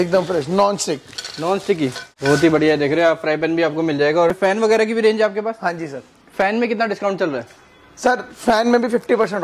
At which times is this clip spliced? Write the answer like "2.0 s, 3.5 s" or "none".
2.1 s, 4.3 s